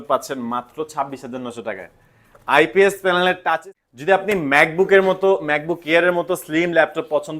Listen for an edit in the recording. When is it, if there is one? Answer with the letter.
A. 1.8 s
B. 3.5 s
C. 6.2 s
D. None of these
B